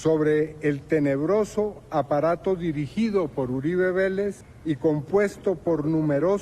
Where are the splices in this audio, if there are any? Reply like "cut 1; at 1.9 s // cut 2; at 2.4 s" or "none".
cut 1; at 4.5 s